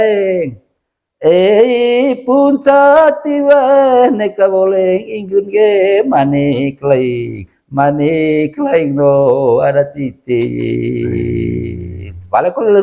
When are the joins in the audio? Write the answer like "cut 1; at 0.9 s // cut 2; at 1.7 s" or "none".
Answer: none